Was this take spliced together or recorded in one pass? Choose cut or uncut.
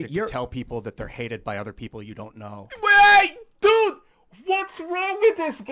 uncut